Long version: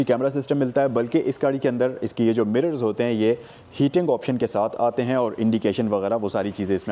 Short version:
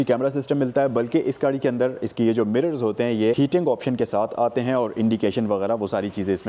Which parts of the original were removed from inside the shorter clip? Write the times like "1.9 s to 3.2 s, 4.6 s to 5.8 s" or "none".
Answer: 3.4 s to 3.8 s